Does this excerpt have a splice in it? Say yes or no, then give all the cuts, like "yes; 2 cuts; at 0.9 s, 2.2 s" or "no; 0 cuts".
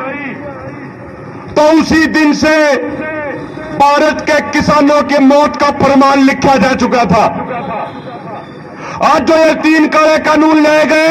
no; 0 cuts